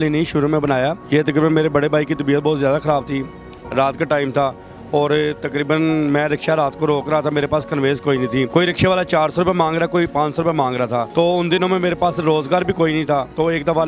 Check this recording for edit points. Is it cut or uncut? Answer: uncut